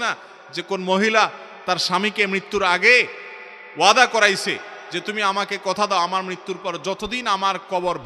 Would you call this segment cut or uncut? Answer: uncut